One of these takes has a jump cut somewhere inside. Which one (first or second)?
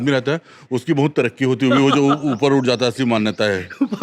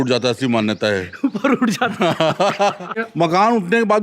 second